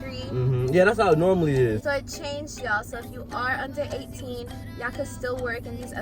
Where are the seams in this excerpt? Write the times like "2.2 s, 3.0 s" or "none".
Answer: 1.8 s